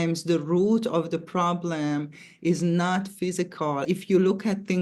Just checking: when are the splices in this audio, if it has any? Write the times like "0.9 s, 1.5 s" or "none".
3.8 s